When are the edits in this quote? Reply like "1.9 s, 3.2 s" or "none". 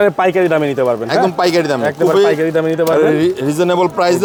none